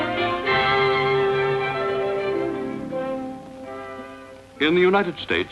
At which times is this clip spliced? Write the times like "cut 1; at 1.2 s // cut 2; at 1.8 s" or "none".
none